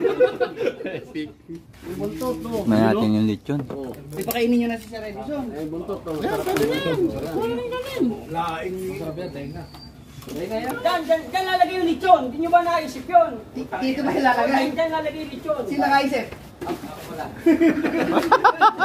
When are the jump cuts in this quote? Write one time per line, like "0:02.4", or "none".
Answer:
0:10.7